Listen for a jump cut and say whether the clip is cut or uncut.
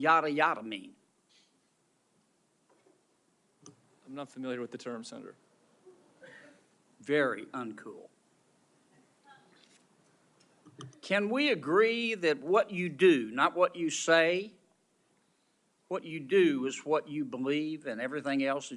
uncut